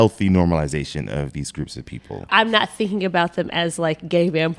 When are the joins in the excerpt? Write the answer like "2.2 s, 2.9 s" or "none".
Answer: 2.2 s